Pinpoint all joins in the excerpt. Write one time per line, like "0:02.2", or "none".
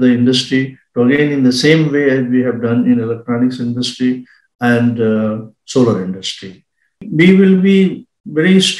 0:07.0